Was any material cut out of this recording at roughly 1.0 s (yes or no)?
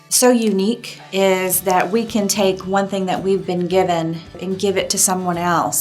yes